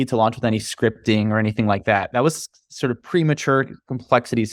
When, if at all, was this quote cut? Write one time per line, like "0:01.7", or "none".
none